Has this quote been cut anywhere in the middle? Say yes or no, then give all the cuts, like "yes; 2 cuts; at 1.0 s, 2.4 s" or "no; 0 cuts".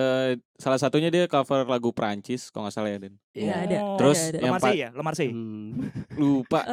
no; 0 cuts